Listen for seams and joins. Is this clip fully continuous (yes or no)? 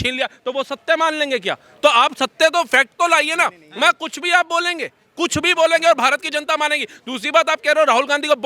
yes